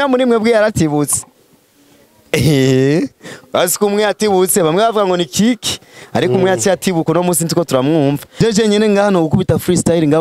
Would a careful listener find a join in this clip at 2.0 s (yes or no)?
no